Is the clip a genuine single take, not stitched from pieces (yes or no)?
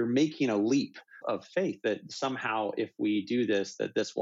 no